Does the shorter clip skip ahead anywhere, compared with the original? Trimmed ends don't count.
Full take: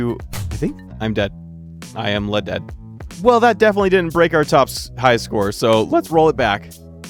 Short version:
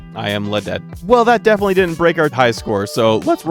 yes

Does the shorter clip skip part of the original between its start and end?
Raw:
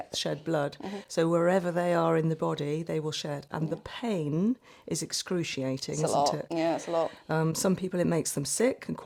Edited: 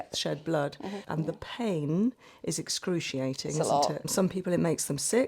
yes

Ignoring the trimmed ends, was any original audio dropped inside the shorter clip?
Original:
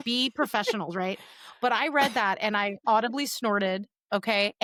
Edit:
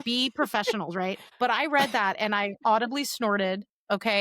yes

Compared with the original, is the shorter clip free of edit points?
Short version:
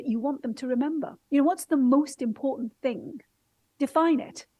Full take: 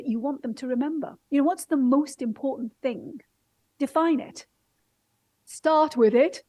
yes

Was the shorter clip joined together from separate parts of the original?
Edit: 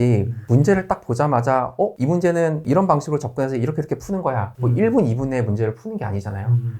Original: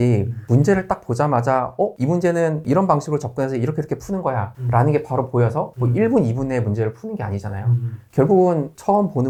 yes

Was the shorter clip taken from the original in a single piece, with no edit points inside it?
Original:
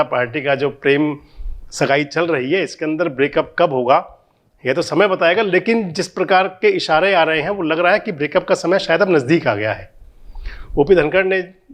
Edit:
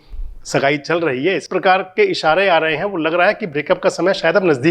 no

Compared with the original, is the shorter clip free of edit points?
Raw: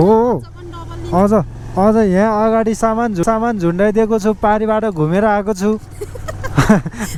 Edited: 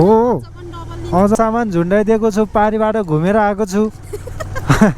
no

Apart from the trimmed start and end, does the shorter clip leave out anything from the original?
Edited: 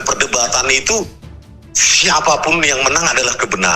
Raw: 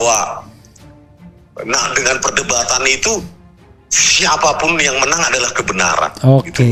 no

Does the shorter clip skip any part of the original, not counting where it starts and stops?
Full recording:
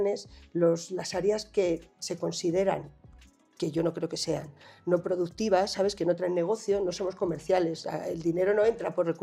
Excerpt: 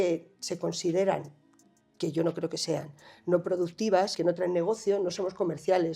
yes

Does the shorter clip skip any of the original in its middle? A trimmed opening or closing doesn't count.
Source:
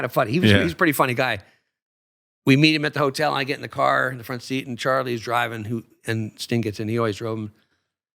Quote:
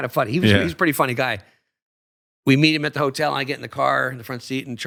no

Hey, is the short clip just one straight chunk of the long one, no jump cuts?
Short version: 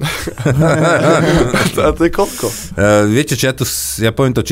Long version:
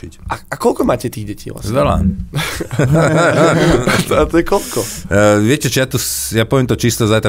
yes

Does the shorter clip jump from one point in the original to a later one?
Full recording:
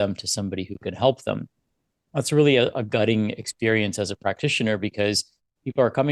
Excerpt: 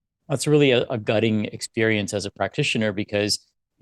no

